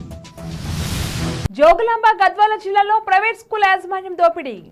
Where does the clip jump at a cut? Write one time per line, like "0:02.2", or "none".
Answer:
0:01.5

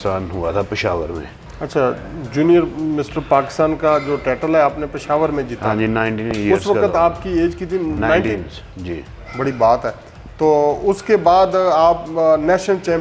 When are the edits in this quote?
none

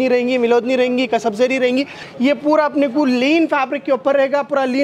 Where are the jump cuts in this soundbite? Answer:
0:02.0

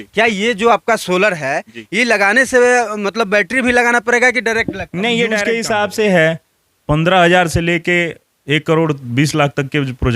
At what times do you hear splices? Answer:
0:05.4

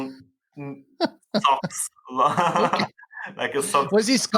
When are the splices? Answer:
none

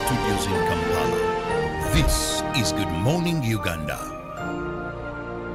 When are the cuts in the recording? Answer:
none

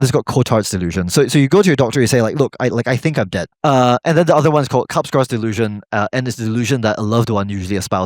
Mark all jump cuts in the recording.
0:03.5

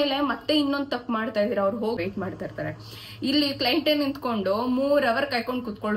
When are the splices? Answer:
0:02.0

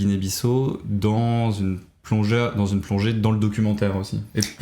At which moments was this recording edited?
none

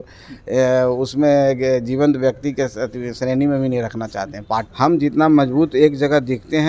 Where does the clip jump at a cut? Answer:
0:04.7

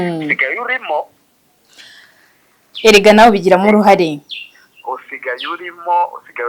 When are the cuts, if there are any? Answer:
none

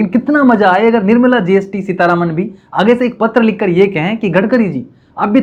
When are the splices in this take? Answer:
none

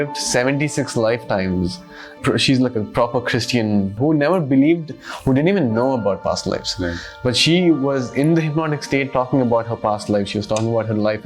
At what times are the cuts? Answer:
0:02.1
0:03.9

